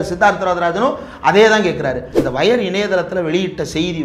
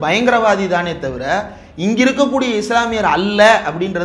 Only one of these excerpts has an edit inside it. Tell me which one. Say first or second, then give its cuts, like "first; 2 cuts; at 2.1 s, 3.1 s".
first; 1 cut; at 2.1 s